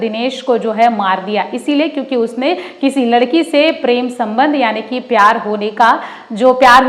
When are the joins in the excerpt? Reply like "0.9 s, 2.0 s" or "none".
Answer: none